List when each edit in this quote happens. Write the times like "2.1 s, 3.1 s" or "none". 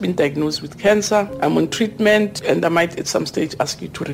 1.3 s, 2.4 s